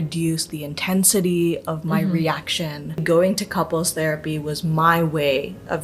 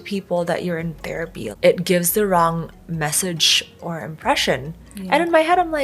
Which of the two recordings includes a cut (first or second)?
first